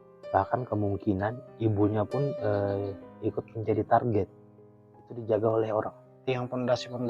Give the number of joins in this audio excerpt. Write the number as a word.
one